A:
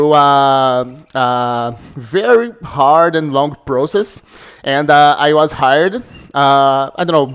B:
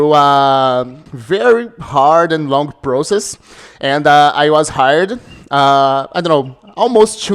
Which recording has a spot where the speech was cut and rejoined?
B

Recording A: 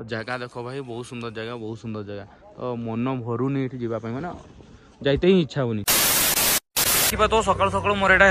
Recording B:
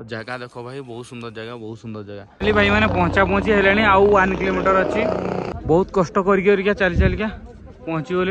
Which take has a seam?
B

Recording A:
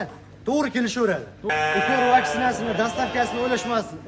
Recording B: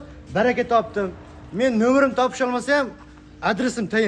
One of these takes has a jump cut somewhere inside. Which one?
A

